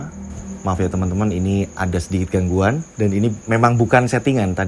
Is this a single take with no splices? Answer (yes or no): no